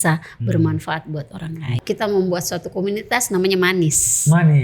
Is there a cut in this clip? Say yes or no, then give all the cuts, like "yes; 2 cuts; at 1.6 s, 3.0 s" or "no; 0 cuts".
yes; 1 cut; at 1.7 s